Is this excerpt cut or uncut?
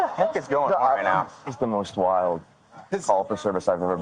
cut